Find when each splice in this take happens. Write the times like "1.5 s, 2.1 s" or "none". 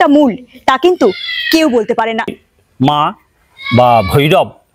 2.4 s